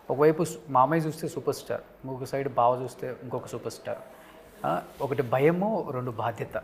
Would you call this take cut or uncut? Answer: uncut